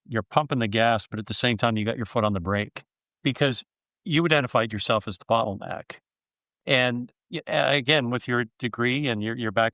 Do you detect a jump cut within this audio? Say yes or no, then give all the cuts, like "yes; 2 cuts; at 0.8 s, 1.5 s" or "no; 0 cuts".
no; 0 cuts